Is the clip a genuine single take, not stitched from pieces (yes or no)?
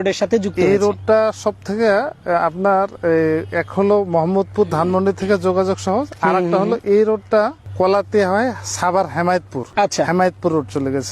no